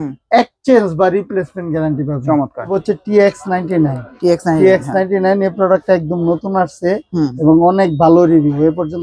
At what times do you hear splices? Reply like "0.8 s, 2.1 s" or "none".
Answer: 2.8 s